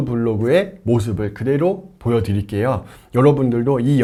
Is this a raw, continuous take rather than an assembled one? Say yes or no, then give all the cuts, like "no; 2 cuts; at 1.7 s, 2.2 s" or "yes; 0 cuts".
yes; 0 cuts